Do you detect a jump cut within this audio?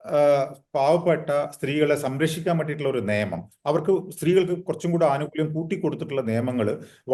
no; 0 cuts

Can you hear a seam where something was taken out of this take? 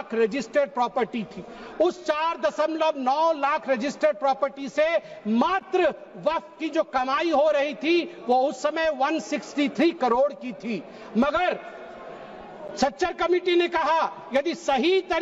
no; 0 cuts

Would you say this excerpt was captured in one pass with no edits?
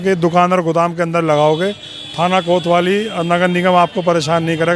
yes; 0 cuts

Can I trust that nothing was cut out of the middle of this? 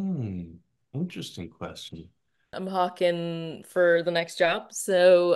no; 1 cut; at 2.5 s

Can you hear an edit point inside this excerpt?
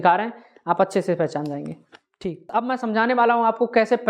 yes; 1 cut; at 2.4 s

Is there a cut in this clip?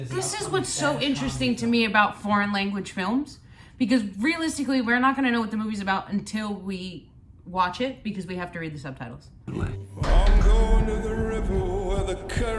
yes; 1 cut; at 9.5 s

